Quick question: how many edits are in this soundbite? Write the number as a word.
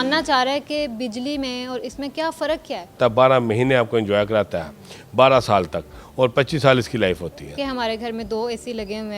two